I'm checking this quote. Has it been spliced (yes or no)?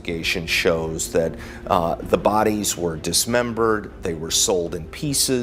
no